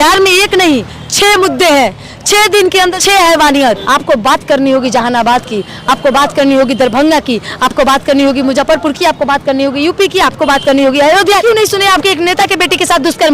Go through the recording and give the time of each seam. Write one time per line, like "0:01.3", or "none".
0:03.0
0:03.8
0:11.4